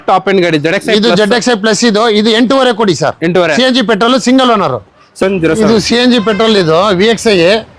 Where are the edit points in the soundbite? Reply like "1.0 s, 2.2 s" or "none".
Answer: 5.2 s